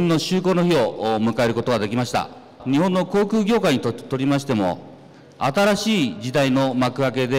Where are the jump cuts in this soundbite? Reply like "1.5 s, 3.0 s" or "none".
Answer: 2.5 s

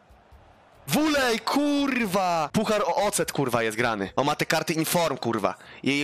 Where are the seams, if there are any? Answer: 4.1 s

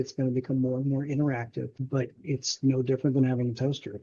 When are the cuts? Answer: 1.8 s

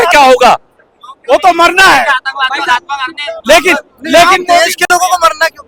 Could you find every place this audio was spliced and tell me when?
none

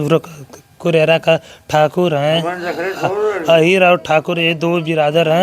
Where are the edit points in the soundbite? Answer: none

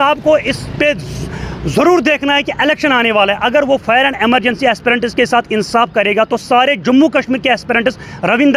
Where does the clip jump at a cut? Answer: none

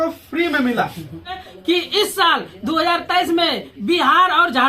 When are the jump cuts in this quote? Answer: 1.4 s

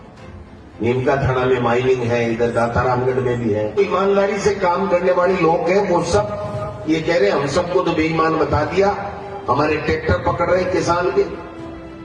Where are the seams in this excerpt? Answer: 3.8 s

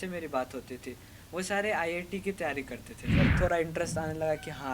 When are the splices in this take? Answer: 3.3 s

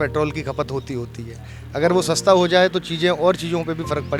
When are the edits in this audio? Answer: none

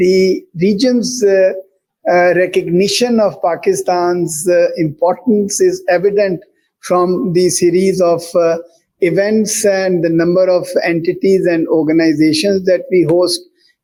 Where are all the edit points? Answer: none

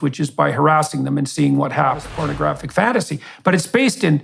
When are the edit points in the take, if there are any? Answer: 2.1 s

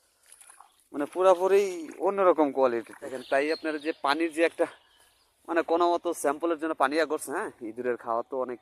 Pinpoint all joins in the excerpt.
3.2 s

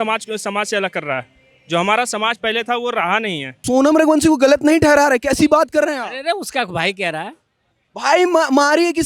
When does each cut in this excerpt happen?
3.5 s

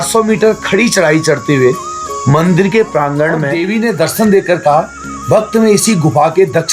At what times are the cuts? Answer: 3.5 s

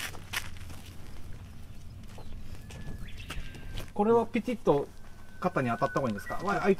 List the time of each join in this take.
none

